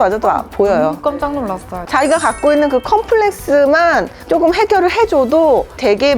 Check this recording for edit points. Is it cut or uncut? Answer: cut